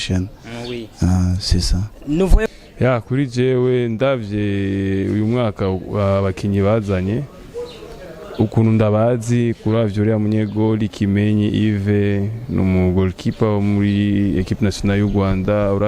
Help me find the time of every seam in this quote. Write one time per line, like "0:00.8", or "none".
0:02.5